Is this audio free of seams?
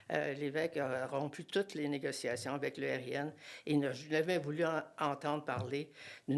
yes; 0 cuts

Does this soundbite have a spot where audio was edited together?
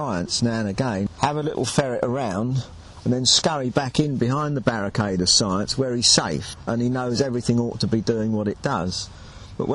yes; 2 cuts; at 1.1 s, 6.5 s

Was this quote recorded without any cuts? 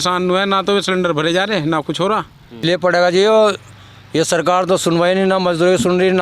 no; 1 cut; at 2.6 s

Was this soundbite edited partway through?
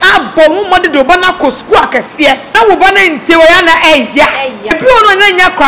yes; 2 cuts; at 2.4 s, 4.8 s

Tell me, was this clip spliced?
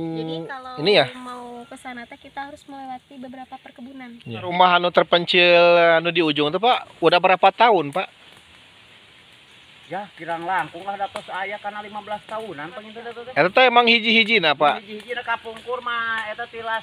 yes; 1 cut; at 4.5 s

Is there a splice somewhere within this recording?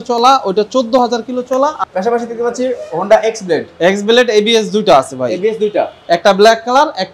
yes; 1 cut; at 1.8 s

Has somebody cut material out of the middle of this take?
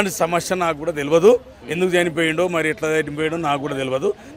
no; 0 cuts

